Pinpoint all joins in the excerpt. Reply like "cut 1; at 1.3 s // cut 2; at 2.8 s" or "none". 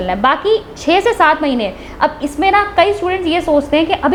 none